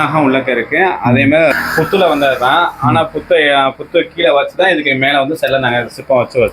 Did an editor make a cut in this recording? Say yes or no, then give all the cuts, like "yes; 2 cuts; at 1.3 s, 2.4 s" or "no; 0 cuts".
yes; 1 cut; at 1.3 s